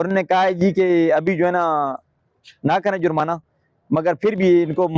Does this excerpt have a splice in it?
no; 0 cuts

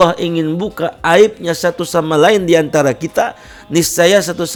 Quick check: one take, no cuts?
yes; 0 cuts

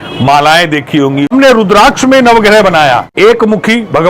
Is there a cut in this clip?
yes; 2 cuts; at 1.3 s, 3.1 s

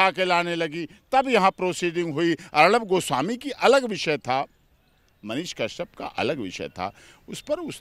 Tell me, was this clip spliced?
no; 0 cuts

